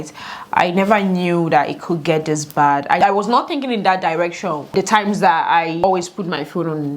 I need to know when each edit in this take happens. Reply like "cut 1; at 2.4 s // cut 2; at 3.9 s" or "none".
cut 1; at 3.0 s // cut 2; at 4.7 s // cut 3; at 5.8 s